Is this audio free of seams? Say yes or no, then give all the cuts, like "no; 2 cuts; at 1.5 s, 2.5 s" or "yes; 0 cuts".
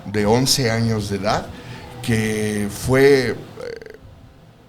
yes; 0 cuts